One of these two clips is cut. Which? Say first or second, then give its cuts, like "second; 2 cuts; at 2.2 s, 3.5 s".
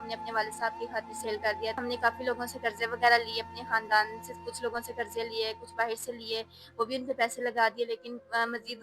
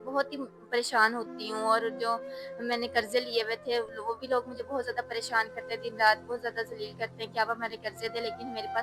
first; 1 cut; at 1.8 s